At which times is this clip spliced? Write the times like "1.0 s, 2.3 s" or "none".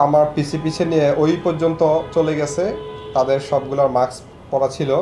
none